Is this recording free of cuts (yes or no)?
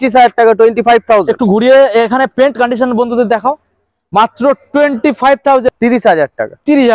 no